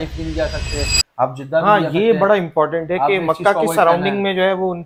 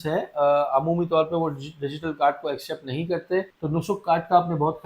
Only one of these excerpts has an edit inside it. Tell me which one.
second; 1 cut; at 3.5 s

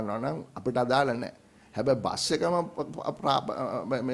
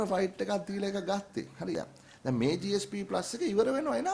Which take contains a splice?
second; 1 cut; at 1.7 s

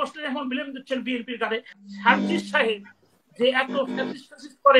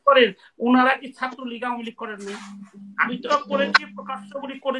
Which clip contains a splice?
first; 1 cut; at 1.7 s

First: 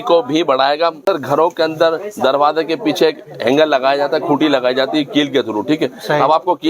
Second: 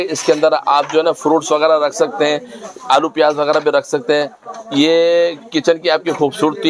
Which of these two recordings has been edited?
first; 1 cut; at 1.0 s

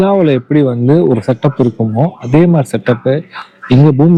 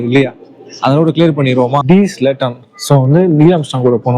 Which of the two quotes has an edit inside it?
second; 1 cut; at 1.8 s

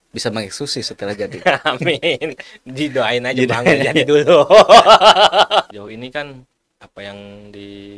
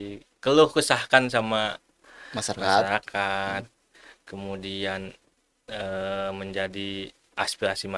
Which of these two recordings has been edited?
first; 1 cut; at 5.7 s

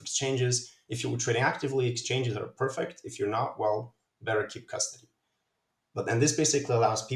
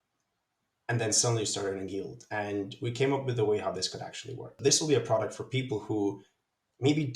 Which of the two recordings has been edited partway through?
second; 1 cut; at 4.6 s

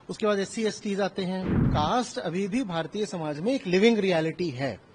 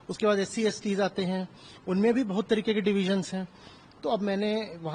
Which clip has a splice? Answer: first; 1 cut; at 1.6 s

